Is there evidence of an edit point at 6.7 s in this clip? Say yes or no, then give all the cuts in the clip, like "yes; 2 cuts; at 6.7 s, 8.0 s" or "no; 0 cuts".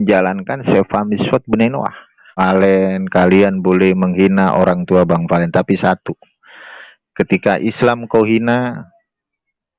no; 1 cut; at 2.3 s